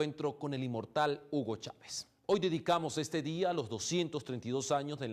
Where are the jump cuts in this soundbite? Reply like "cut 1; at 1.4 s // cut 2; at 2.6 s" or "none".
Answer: none